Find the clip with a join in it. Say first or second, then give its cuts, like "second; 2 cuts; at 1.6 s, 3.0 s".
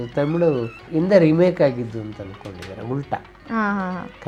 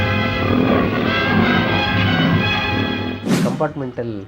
second; 1 cut; at 3.4 s